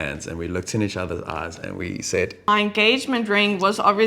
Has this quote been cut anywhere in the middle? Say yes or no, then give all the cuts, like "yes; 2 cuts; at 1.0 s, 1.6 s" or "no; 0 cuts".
yes; 1 cut; at 2.5 s